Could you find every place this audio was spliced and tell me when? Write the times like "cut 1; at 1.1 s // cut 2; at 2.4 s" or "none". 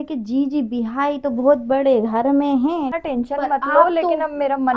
cut 1; at 2.9 s